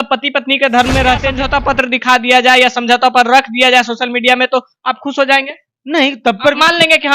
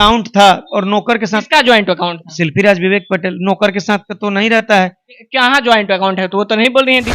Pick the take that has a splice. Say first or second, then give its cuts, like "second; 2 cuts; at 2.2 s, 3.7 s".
first; 1 cut; at 1.4 s